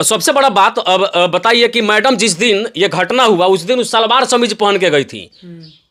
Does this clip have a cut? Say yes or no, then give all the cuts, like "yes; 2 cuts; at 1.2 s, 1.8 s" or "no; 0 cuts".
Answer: no; 0 cuts